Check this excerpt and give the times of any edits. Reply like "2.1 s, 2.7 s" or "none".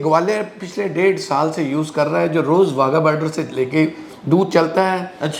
none